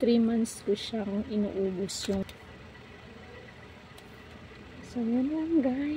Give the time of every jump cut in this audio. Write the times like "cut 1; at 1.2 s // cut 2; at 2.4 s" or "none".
cut 1; at 2.2 s